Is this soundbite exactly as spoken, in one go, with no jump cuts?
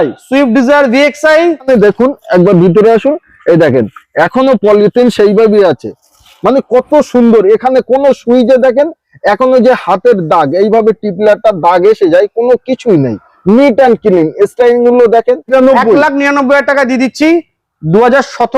no; 2 cuts; at 1.5 s, 15.5 s

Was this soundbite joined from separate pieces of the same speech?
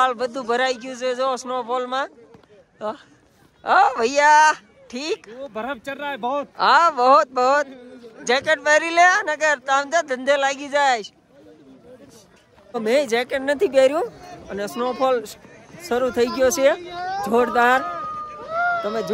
no; 0 cuts

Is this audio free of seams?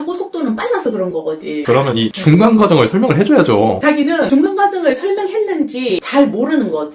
no; 3 cuts; at 1.6 s, 4.3 s, 6.1 s

